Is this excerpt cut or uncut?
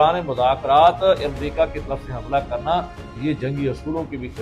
uncut